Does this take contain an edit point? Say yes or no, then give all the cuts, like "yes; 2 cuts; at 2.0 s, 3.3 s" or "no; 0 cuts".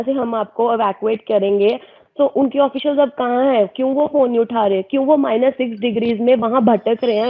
no; 0 cuts